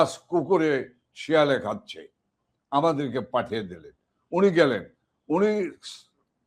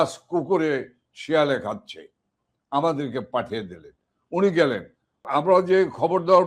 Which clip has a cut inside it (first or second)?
second